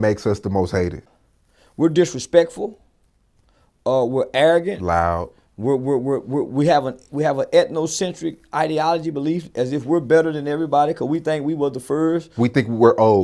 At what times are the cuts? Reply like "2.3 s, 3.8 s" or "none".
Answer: 1.0 s